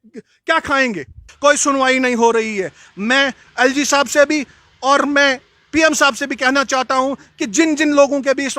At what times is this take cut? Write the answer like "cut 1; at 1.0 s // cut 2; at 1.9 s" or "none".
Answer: cut 1; at 1.2 s